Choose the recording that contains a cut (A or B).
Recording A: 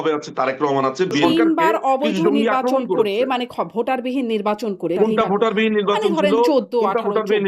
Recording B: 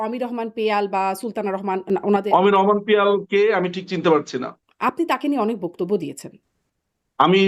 A